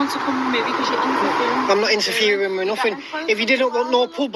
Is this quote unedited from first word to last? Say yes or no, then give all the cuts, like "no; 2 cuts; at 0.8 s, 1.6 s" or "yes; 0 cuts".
no; 1 cut; at 3.1 s